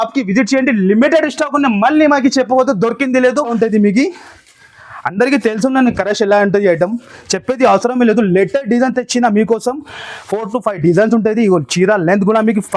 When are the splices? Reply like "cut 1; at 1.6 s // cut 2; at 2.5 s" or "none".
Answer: cut 1; at 3.5 s